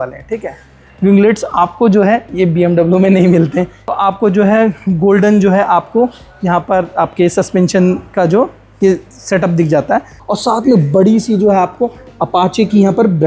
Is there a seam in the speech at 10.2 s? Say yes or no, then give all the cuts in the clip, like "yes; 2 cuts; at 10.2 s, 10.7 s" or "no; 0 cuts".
yes; 2 cuts; at 3.8 s, 10.2 s